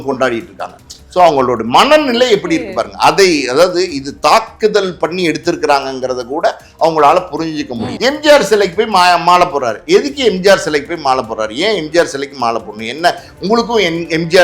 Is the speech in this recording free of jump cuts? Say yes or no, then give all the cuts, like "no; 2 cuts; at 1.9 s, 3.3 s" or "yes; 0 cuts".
no; 1 cut; at 7.8 s